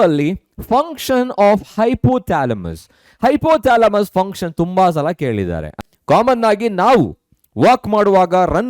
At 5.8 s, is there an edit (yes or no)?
yes